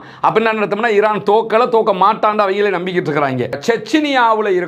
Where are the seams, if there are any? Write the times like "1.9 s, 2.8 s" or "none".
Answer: 3.5 s